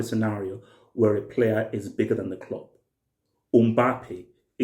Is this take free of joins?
yes; 0 cuts

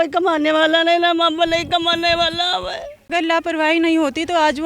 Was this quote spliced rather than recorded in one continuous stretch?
yes; 1 cut; at 3.1 s

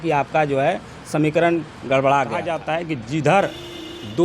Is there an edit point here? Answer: yes; 1 cut; at 2.5 s

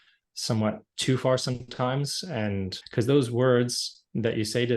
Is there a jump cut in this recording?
yes; 1 cut; at 2.8 s

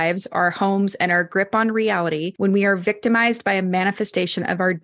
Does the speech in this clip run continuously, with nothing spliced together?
no; 1 cut; at 2.3 s

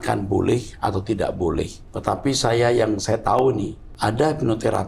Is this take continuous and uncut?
no; 2 cuts; at 1.8 s, 3.8 s

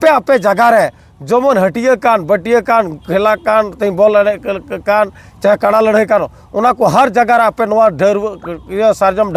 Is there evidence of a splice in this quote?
no; 0 cuts

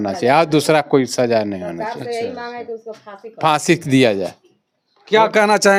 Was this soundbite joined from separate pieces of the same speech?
no; 0 cuts

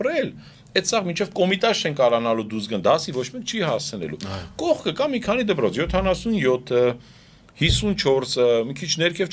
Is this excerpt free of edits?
yes; 0 cuts

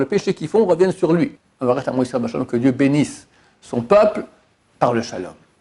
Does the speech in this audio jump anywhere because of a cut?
yes; 1 cut; at 1.4 s

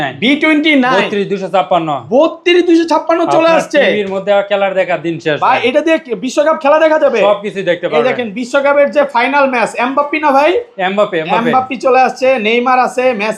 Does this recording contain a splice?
no; 0 cuts

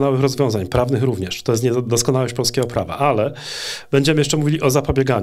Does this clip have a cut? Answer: no; 0 cuts

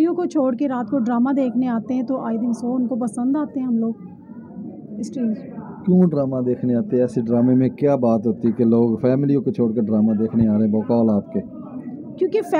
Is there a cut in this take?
no; 0 cuts

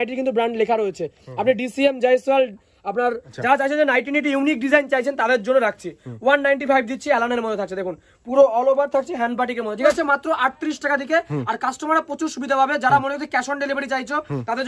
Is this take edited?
yes; 2 cuts; at 3.2 s, 9.8 s

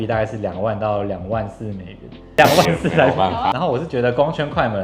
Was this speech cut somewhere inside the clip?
yes; 2 cuts; at 2.3 s, 3.5 s

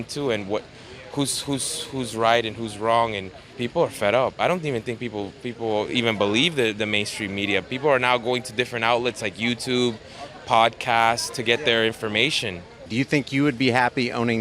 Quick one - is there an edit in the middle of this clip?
yes; 2 cuts; at 3.5 s, 12.8 s

